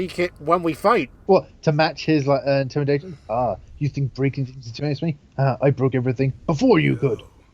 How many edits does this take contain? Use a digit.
1